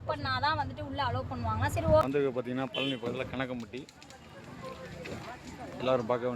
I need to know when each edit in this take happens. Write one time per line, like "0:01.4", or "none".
0:02.1

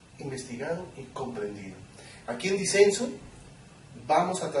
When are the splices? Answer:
none

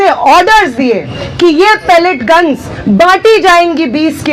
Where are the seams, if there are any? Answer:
0:02.0

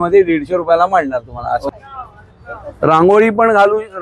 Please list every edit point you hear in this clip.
0:01.6

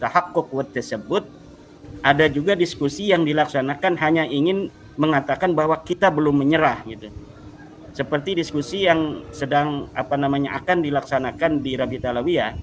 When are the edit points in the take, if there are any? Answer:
none

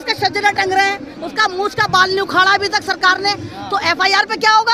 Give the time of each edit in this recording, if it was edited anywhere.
none

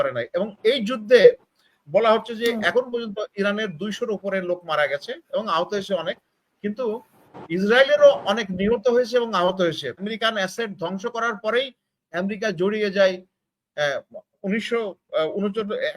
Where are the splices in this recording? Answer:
0:10.0

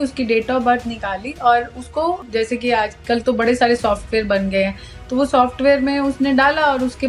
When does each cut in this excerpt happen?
0:02.2

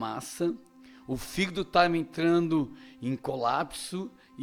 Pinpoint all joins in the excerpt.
none

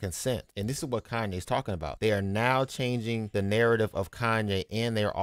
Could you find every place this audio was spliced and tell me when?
none

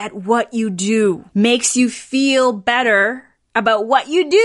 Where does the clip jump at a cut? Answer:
0:01.2

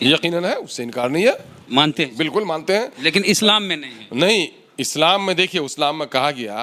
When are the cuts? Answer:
none

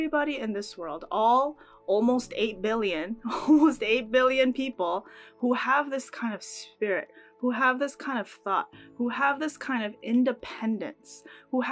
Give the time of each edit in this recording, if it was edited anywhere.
none

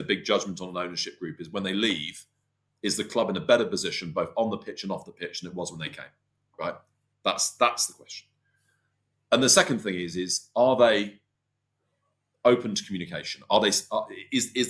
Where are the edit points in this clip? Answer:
none

